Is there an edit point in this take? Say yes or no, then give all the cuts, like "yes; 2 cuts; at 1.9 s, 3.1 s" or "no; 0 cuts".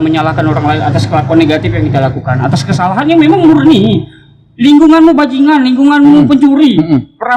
no; 0 cuts